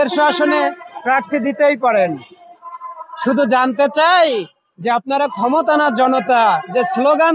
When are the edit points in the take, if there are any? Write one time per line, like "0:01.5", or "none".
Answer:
none

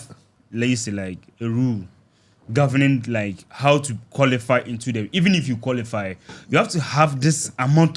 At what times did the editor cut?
none

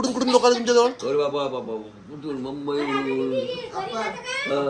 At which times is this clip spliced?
none

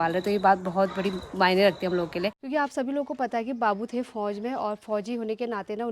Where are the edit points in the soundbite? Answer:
0:02.4

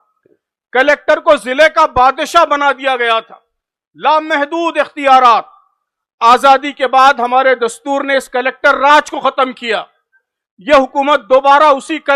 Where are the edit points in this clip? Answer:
none

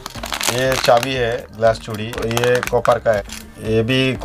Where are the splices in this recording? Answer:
0:02.2
0:03.2

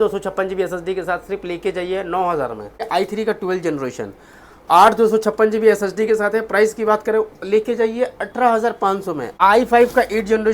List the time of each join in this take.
0:02.9
0:09.3

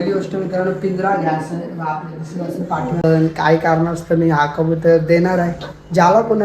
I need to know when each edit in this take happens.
0:03.0

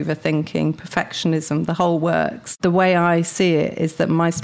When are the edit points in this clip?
0:02.6

